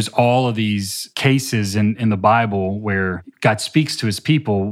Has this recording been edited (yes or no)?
yes